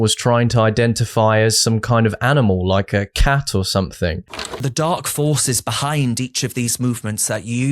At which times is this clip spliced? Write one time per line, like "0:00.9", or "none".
0:04.6